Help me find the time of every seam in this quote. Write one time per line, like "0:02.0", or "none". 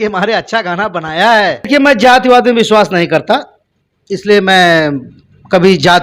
0:01.7